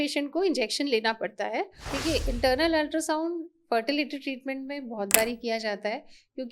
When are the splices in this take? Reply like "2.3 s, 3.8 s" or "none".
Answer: 1.8 s